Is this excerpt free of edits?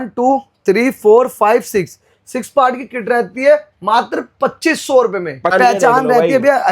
no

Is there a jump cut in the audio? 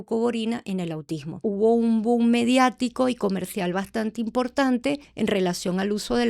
yes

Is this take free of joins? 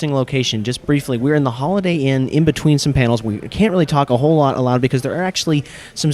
no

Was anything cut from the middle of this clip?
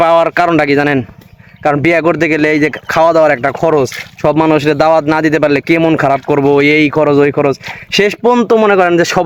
no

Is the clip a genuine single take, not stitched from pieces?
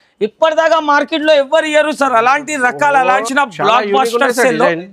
no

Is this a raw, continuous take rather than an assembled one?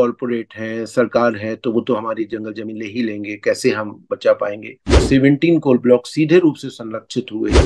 no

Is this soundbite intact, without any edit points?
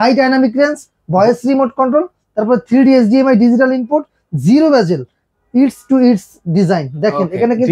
yes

